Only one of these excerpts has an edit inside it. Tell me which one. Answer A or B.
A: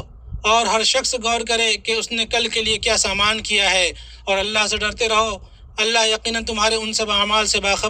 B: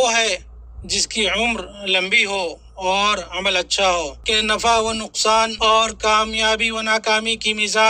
B